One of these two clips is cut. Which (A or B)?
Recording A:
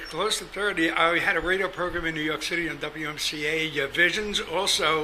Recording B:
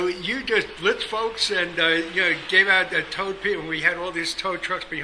A